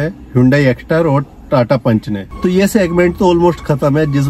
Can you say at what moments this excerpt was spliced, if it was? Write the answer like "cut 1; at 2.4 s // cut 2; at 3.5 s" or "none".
cut 1; at 2.2 s